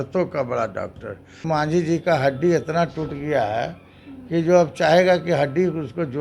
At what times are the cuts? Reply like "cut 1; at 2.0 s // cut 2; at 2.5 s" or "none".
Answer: cut 1; at 1.4 s